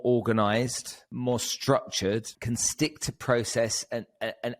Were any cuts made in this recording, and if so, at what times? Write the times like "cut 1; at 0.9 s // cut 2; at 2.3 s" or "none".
cut 1; at 1.0 s // cut 2; at 2.3 s